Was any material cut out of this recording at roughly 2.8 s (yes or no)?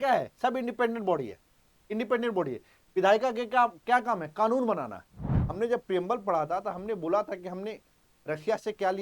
no